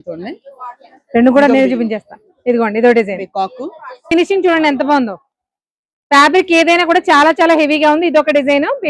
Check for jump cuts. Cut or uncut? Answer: cut